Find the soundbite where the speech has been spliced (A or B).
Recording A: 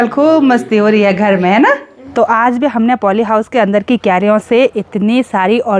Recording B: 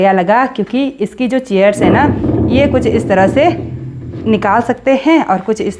A